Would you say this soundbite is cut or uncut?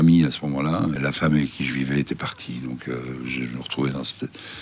cut